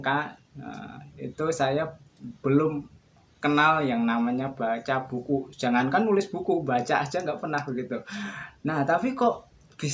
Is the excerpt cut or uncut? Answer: uncut